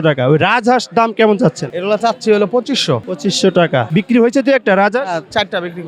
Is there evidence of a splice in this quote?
yes; 3 cuts; at 1.7 s, 3.1 s, 3.9 s

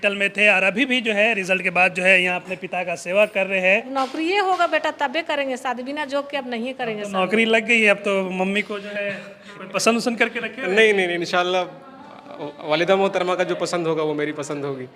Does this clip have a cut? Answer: yes; 1 cut; at 3.9 s

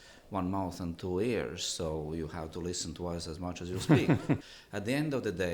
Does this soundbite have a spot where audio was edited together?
yes; 1 cut; at 4.6 s

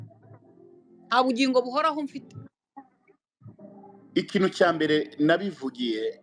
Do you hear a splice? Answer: no; 0 cuts

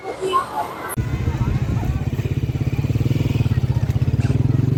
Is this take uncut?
yes; 0 cuts

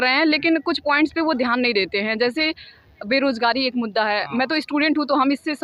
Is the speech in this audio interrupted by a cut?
no; 0 cuts

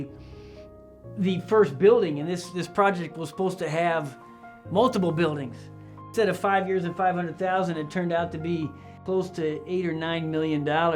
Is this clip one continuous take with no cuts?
no; 2 cuts; at 6.1 s, 9.0 s

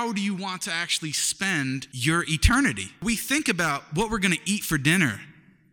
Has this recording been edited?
yes; 2 cuts; at 1.9 s, 3.0 s

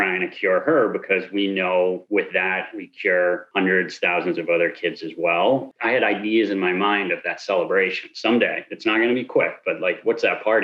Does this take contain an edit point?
yes; 1 cut; at 5.7 s

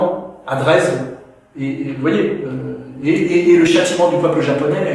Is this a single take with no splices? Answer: yes; 0 cuts

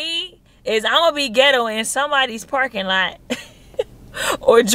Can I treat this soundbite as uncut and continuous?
yes; 0 cuts

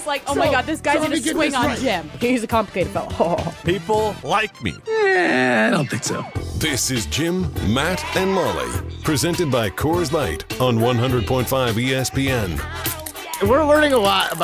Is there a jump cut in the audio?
yes; 1 cut; at 13.3 s

